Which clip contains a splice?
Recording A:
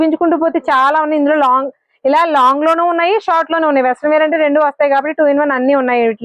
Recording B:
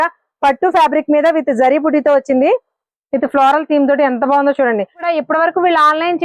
B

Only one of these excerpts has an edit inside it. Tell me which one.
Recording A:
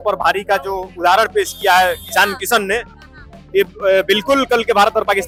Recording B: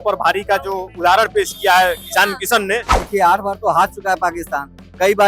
B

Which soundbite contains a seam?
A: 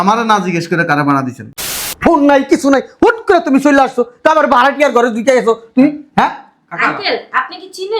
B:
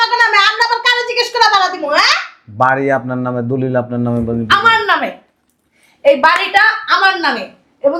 A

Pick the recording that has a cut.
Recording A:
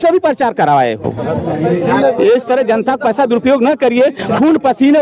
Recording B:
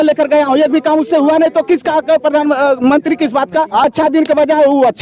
B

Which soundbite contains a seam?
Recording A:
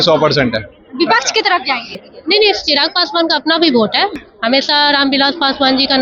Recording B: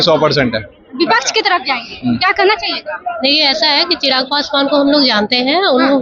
A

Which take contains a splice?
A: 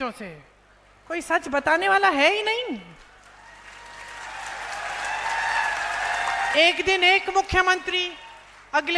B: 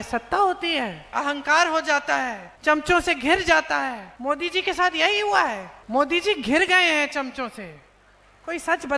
B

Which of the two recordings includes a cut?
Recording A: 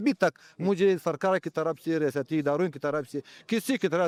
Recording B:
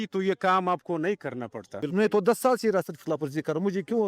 B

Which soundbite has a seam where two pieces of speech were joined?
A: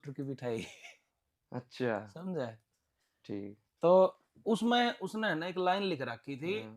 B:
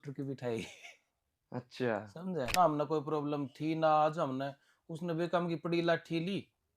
B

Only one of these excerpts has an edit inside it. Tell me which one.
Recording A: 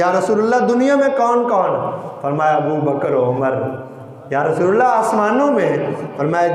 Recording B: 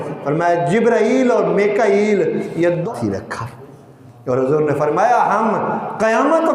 B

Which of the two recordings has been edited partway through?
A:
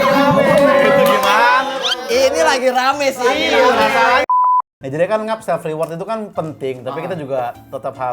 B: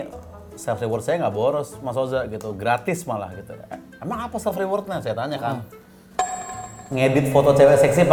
A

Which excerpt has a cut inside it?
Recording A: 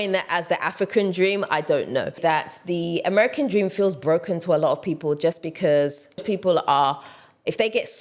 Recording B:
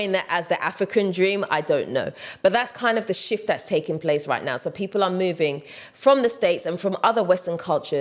A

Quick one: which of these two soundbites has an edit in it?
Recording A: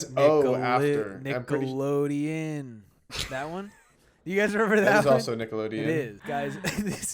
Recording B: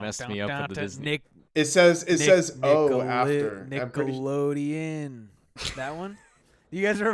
A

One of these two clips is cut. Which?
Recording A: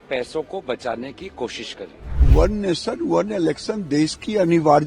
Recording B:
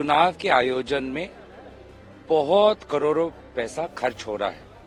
A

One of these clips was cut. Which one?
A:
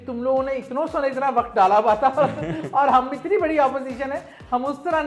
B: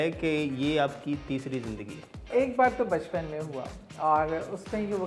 B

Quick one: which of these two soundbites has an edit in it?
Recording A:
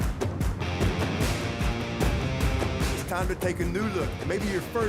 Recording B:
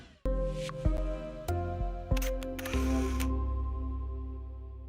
B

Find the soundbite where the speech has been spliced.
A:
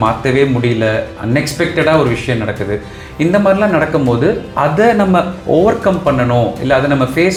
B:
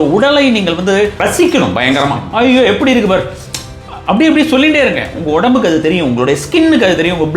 B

